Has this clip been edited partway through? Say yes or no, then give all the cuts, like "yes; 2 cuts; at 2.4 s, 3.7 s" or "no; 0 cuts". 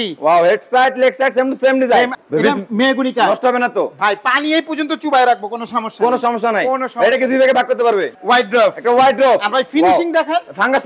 yes; 2 cuts; at 2.2 s, 8.1 s